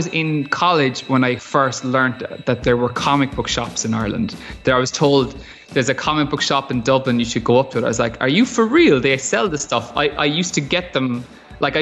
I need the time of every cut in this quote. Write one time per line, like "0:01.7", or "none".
0:01.4
0:02.6